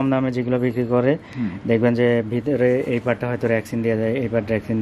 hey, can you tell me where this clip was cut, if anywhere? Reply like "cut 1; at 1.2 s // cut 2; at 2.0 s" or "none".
none